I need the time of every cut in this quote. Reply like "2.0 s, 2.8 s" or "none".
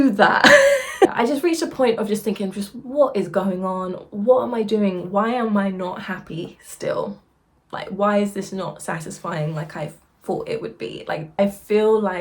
1.1 s, 11.3 s